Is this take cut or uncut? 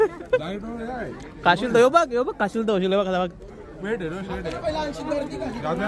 uncut